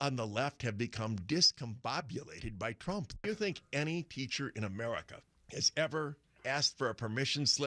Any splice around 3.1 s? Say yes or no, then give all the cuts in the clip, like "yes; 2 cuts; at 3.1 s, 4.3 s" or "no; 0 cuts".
yes; 1 cut; at 3.1 s